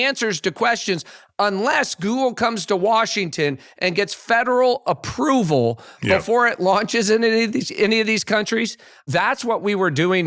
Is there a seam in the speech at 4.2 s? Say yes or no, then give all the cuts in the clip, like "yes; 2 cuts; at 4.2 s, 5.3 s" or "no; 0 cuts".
no; 1 cut; at 9.1 s